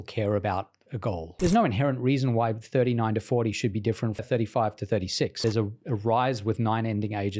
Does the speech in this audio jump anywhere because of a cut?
yes; 3 cuts; at 1.3 s, 4.2 s, 5.4 s

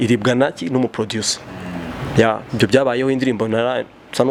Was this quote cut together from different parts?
no; 0 cuts

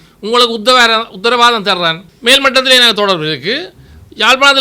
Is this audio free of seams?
no; 1 cut; at 2.1 s

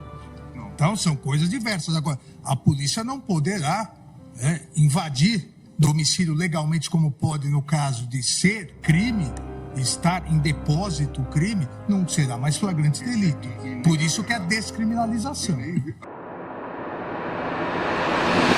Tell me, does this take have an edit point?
yes; 1 cut; at 16.1 s

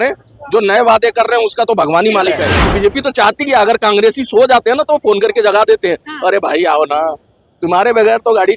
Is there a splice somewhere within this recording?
yes; 1 cut; at 2.6 s

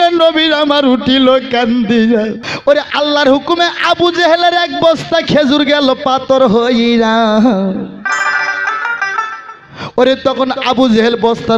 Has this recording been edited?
yes; 1 cut; at 2.5 s

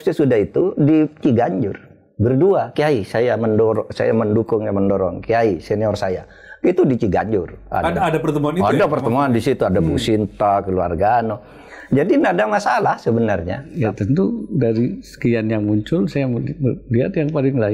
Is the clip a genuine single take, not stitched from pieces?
no; 1 cut; at 13.6 s

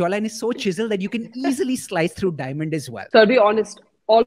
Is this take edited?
yes; 1 cut; at 2.9 s

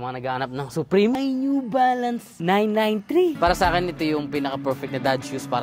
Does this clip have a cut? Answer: yes; 2 cuts; at 1.2 s, 3.4 s

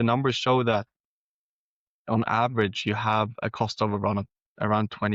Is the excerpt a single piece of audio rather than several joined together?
yes; 0 cuts

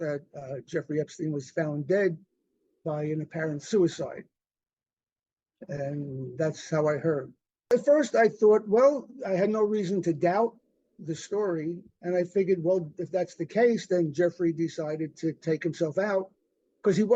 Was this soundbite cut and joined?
yes; 1 cut; at 7.7 s

